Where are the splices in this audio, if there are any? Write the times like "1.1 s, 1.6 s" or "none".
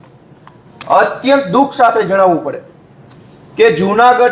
none